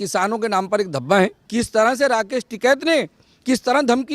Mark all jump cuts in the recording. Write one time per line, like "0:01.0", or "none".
0:01.4